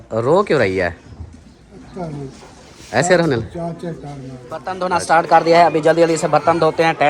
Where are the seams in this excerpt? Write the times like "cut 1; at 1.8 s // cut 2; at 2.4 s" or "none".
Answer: cut 1; at 4.7 s